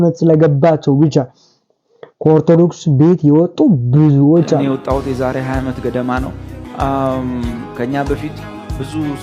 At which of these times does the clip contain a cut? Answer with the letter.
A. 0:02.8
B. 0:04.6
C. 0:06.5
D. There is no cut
B